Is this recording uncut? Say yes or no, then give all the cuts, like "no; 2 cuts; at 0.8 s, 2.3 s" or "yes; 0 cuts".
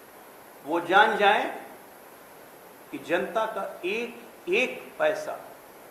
yes; 0 cuts